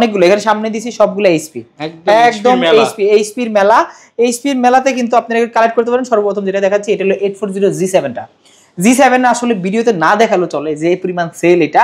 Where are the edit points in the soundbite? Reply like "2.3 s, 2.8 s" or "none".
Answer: none